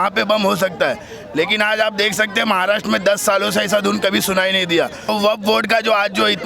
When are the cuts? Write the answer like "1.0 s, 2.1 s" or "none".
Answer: 5.1 s